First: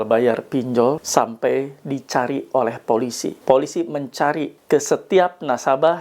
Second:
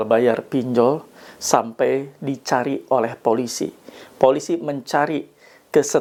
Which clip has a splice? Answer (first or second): first